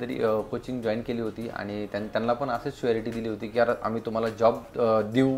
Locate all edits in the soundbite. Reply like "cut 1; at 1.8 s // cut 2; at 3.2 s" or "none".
none